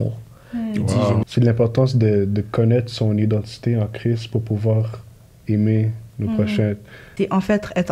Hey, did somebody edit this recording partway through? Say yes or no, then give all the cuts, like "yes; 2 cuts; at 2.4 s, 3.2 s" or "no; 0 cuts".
yes; 2 cuts; at 1.2 s, 7.0 s